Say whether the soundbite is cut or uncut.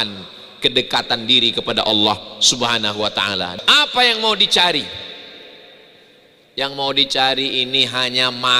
cut